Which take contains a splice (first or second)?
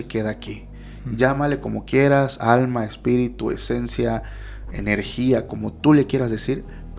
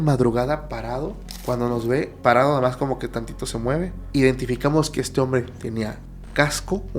second